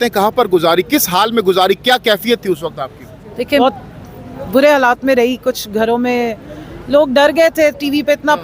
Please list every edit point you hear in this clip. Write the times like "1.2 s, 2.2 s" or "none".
3.6 s